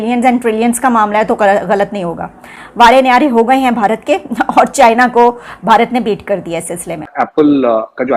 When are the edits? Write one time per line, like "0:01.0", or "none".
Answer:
0:07.1